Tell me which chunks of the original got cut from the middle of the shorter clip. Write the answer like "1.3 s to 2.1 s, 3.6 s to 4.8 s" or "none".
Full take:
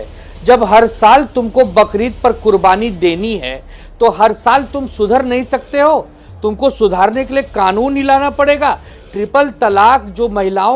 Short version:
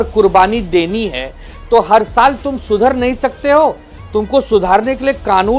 none